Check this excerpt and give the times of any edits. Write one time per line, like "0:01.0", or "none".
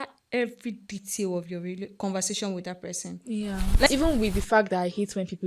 0:03.9